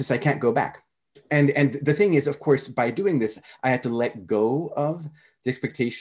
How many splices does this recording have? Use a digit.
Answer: 1